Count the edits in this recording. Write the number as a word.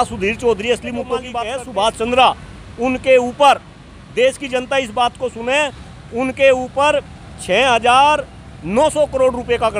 one